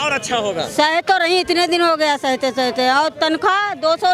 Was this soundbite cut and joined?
no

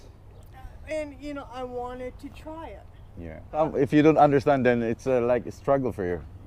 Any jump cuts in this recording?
yes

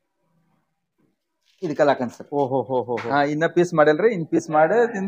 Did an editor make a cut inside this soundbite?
no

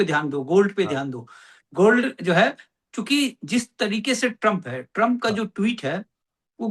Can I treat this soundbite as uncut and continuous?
yes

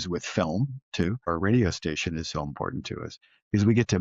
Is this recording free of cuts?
no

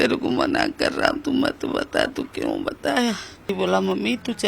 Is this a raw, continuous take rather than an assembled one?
no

